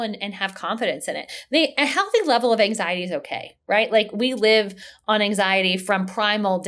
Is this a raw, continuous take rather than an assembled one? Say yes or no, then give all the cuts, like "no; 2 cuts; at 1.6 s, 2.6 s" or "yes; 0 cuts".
yes; 0 cuts